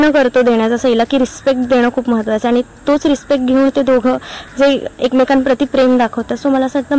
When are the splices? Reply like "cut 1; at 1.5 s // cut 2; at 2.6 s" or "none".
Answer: none